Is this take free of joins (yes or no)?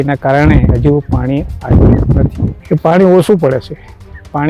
no